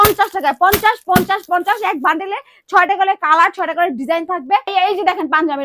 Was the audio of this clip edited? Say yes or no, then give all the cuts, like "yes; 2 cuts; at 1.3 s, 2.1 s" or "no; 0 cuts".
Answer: yes; 1 cut; at 4.7 s